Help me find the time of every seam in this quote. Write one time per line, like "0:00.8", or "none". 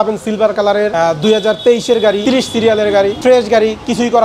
0:00.9
0:02.2
0:03.2